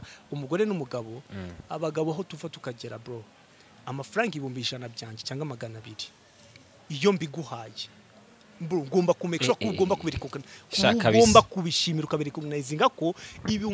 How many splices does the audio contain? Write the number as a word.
zero